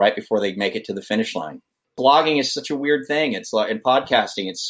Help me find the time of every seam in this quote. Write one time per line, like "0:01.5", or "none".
0:02.0